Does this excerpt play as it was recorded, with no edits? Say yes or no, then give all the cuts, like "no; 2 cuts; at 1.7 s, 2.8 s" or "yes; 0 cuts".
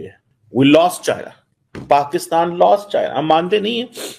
yes; 0 cuts